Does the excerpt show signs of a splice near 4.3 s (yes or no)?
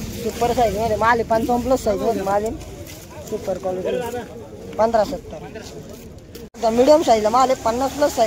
no